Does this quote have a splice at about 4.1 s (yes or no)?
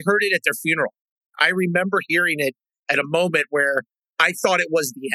no